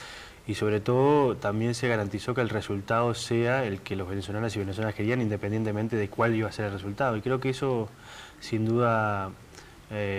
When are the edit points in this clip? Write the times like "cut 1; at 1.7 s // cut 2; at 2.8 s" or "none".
cut 1; at 4.0 s